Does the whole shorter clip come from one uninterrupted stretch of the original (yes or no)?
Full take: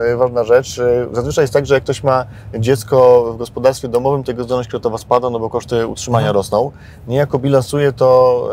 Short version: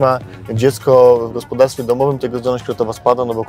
yes